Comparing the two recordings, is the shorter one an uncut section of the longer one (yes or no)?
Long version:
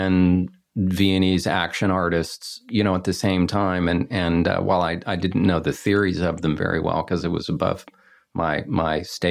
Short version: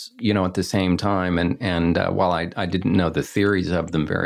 yes